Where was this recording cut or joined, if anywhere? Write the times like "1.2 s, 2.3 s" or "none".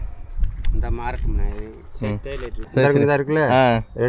2.6 s